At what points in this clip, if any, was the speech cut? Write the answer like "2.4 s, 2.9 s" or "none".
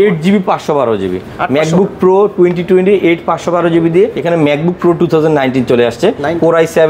4.2 s